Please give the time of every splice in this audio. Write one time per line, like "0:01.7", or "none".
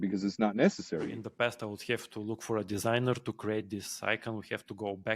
0:01.1